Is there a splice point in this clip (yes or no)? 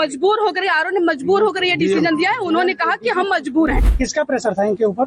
yes